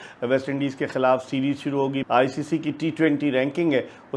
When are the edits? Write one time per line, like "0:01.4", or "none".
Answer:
0:02.0